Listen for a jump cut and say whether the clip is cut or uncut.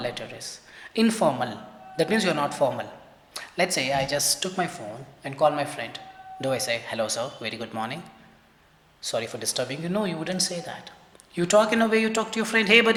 uncut